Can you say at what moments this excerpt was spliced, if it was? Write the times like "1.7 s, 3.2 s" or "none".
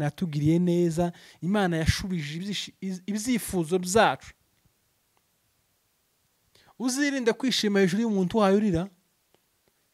none